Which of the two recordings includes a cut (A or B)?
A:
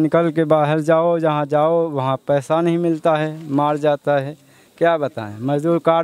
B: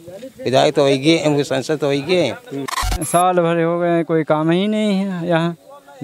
B